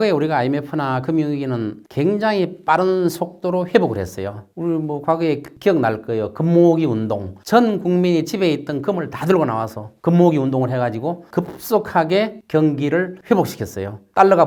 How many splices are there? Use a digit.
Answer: 0